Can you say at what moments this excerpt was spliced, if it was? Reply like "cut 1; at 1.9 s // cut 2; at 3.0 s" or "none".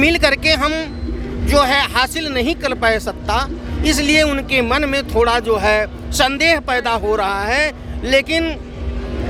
none